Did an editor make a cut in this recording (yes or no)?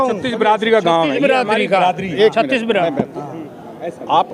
no